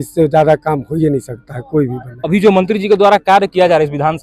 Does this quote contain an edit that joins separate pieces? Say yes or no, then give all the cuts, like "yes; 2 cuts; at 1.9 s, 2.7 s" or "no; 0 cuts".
yes; 1 cut; at 2.1 s